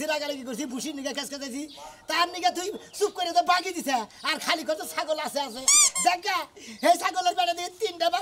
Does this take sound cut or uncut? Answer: uncut